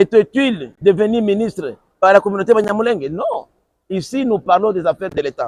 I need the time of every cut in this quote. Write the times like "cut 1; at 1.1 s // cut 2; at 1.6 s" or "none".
none